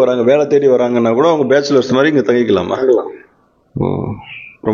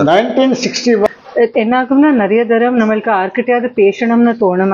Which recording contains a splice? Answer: second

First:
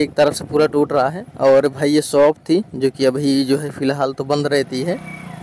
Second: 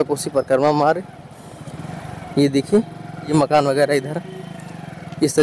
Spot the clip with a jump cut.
second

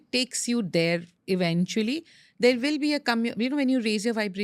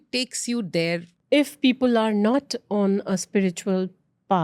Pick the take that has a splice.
second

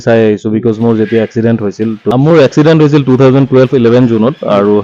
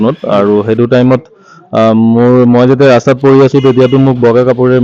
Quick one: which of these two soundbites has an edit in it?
first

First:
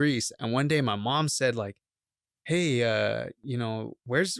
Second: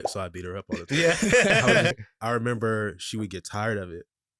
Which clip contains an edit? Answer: second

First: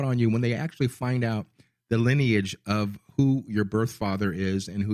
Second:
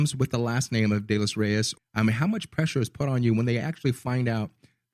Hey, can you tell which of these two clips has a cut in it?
second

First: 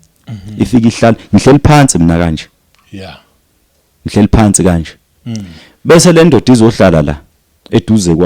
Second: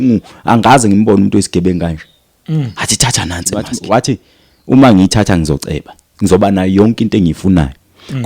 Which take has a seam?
second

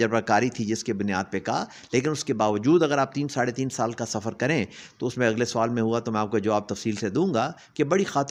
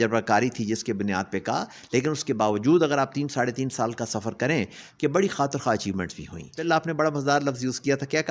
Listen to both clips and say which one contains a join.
second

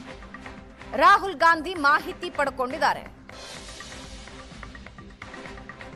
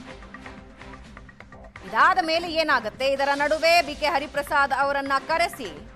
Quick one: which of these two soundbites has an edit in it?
second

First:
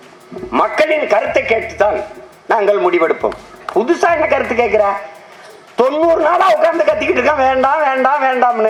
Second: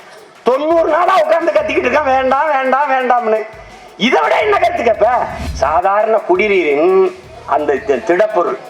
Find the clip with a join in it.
second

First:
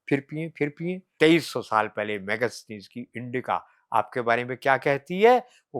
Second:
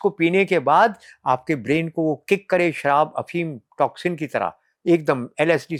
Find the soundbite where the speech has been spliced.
first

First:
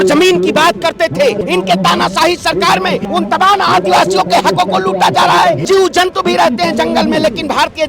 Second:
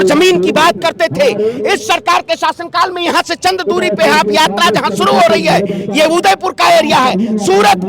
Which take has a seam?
first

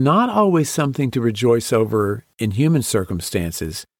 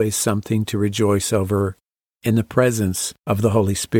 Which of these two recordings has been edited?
second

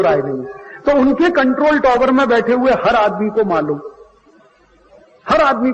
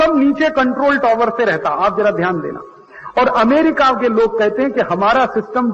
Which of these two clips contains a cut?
second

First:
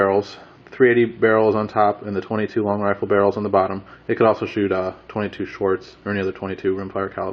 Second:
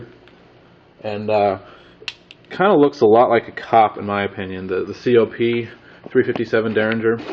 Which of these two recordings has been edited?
first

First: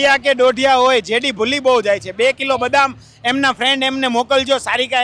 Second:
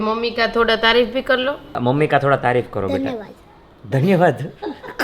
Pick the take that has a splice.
second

